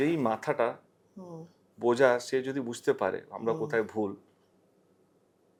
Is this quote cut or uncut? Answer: uncut